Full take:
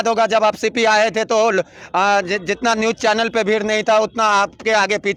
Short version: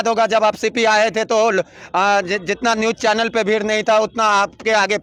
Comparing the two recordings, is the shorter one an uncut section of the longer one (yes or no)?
yes